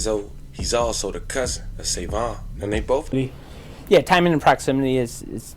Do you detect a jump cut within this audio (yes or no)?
yes